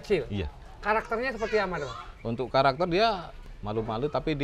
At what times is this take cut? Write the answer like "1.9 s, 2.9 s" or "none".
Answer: 3.4 s